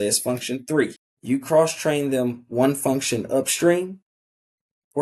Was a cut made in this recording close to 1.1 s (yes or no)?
yes